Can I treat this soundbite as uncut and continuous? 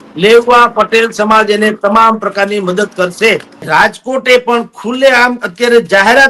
no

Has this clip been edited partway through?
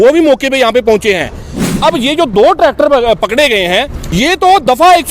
yes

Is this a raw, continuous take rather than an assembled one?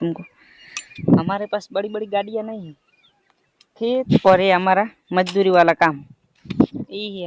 yes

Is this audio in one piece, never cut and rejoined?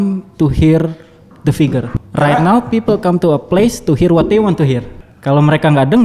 no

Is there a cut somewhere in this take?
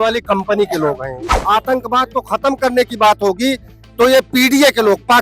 yes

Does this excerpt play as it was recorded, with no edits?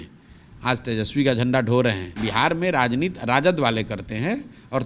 no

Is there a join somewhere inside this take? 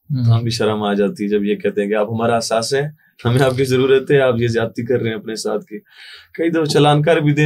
no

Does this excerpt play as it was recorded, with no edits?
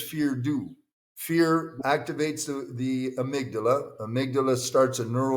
no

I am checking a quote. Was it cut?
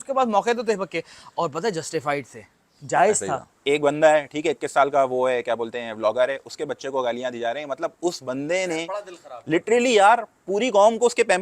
yes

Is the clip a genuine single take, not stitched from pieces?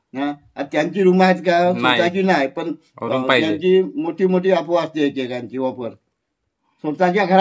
yes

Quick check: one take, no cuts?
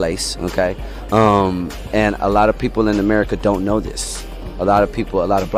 yes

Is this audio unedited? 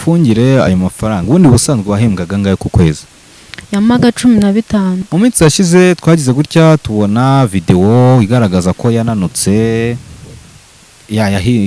no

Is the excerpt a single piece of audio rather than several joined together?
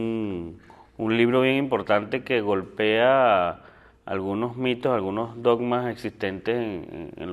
no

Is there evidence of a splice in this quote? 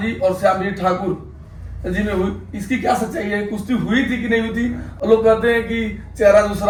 no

